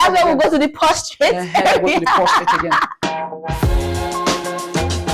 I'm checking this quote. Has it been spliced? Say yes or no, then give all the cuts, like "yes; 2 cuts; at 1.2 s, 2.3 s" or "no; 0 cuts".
yes; 1 cut; at 3.0 s